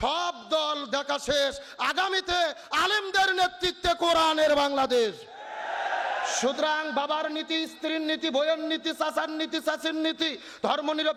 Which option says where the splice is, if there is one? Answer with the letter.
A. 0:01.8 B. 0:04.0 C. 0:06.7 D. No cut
D